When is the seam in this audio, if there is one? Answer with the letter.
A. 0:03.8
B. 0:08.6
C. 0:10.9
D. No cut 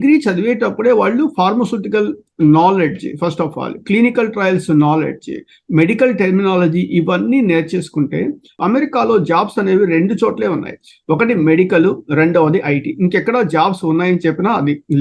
B